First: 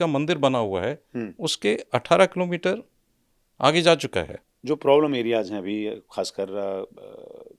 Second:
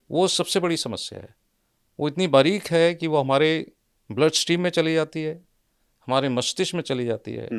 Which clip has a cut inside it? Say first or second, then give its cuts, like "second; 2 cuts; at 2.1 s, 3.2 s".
first; 1 cut; at 4.4 s